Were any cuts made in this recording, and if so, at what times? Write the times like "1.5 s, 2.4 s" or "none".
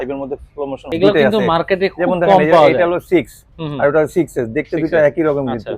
0.9 s